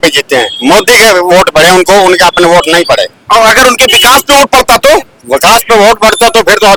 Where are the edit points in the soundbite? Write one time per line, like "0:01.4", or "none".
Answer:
none